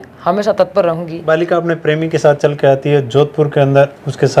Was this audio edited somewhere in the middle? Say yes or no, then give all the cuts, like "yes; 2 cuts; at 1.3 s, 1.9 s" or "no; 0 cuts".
yes; 1 cut; at 1.2 s